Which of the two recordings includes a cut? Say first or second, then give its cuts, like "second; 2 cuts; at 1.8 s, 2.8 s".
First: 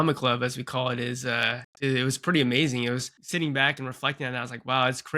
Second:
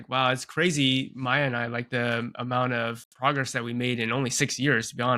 first; 2 cuts; at 1.6 s, 3.2 s